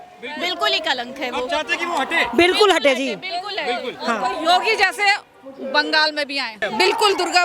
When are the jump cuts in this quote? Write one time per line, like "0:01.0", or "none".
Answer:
0:06.5